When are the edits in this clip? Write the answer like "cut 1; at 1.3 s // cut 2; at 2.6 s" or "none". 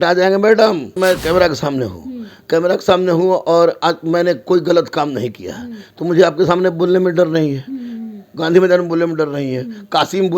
cut 1; at 0.9 s